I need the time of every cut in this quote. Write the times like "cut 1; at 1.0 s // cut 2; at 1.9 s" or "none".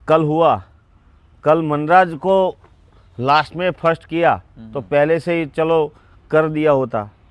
none